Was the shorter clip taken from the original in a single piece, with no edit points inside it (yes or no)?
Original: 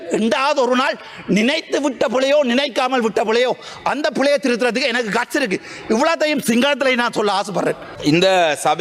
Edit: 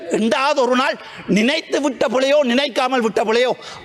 yes